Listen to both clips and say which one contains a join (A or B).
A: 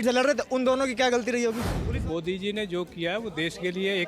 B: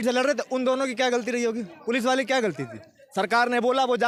A